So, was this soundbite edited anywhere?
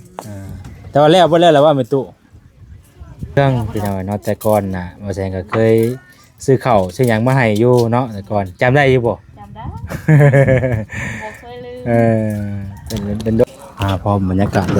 yes; 2 cuts; at 3.4 s, 13.4 s

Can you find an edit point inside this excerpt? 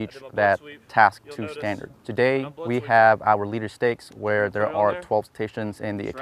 yes; 2 cuts; at 1.9 s, 2.5 s

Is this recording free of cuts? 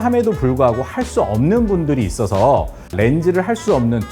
no; 1 cut; at 2.9 s

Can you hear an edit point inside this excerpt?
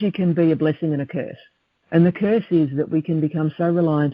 no; 0 cuts

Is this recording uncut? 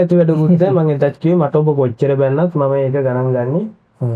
yes; 0 cuts

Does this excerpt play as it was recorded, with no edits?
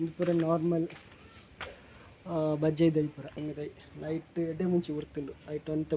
no; 1 cut; at 3.3 s

